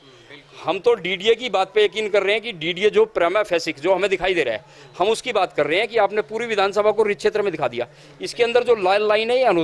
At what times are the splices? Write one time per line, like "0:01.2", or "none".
none